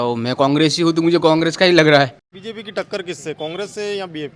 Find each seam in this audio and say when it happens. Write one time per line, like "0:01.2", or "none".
0:02.3

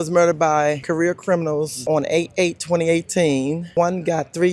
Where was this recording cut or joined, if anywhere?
0:00.8
0:01.8
0:03.7

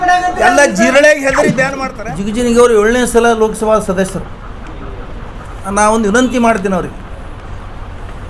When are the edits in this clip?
0:01.7
0:05.5

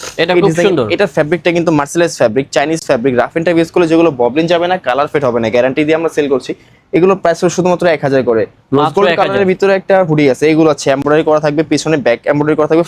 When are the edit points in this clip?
none

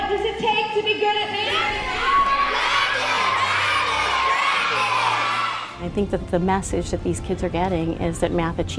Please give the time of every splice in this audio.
0:05.7

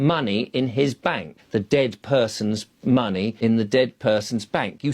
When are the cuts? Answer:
0:01.3
0:03.3

